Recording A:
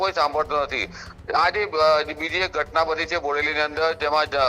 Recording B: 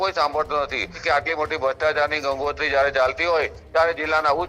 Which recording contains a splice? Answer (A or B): B